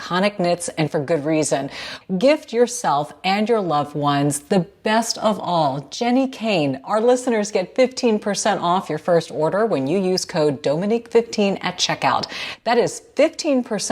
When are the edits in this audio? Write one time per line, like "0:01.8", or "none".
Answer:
0:01.9